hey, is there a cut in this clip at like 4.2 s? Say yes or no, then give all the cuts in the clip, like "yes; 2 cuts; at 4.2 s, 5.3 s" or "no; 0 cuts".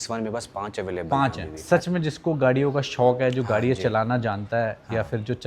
no; 1 cut; at 1.6 s